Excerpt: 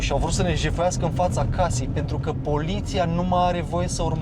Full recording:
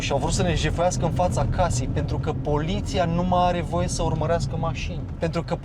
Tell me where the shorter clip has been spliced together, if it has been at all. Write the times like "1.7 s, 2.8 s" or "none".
none